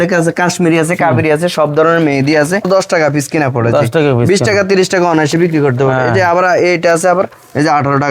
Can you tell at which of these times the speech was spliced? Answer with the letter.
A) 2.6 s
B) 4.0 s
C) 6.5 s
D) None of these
A